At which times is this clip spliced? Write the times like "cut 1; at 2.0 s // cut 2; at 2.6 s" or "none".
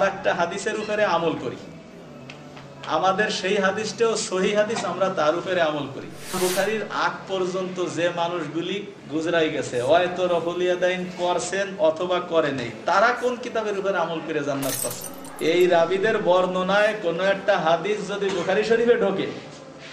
cut 1; at 6.4 s // cut 2; at 15.1 s